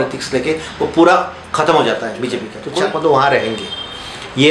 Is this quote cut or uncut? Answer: cut